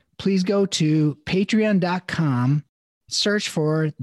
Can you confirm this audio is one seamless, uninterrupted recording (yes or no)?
yes